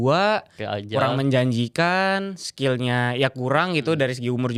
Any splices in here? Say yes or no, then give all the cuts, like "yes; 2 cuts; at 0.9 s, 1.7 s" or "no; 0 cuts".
no; 0 cuts